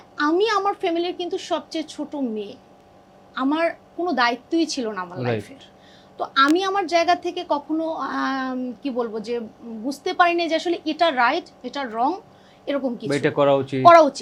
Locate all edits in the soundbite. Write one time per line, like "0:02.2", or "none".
none